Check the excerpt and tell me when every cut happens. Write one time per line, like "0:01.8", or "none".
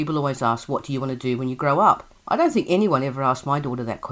0:02.1